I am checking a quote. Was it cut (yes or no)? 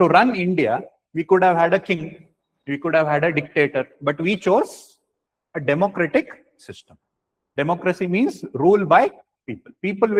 no